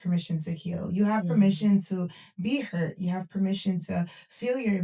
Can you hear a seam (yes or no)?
no